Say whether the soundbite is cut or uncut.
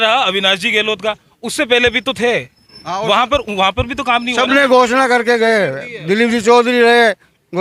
uncut